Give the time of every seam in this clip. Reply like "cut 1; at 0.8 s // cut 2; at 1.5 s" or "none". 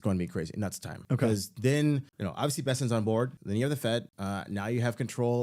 cut 1; at 0.9 s // cut 2; at 2.2 s // cut 3; at 3.4 s // cut 4; at 4.1 s